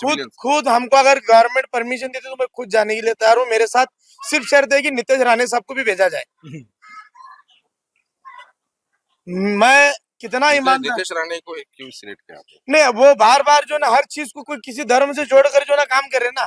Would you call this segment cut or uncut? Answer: uncut